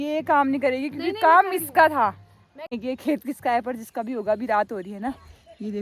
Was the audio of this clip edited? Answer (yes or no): yes